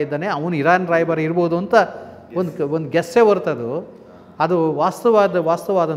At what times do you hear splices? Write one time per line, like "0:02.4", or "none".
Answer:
none